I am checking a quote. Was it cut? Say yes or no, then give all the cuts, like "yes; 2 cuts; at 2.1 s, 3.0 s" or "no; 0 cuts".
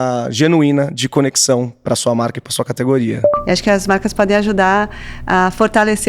yes; 1 cut; at 3.3 s